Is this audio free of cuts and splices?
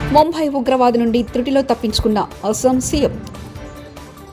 yes; 0 cuts

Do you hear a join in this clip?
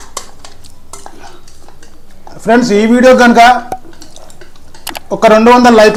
no; 0 cuts

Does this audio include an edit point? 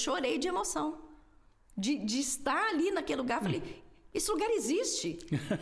no; 0 cuts

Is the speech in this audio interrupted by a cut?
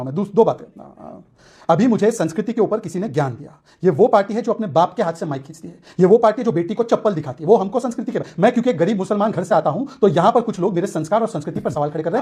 no; 0 cuts

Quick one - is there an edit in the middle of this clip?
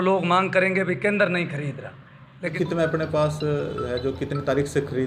yes; 1 cut; at 2.5 s

